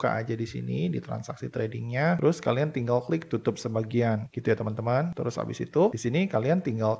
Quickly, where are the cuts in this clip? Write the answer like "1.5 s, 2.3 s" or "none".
none